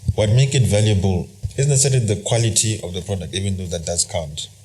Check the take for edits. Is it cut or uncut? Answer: cut